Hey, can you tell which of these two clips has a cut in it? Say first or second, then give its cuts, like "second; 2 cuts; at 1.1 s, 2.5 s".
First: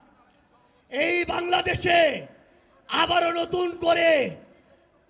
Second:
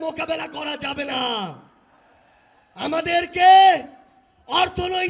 second; 1 cut; at 3.0 s